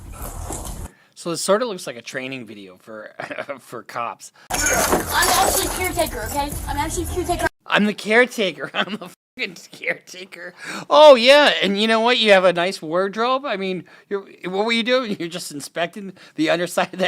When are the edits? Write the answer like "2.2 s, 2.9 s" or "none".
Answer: 4.3 s